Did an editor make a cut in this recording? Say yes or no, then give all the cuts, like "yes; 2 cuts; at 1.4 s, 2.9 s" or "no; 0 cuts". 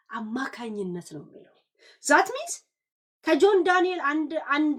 no; 0 cuts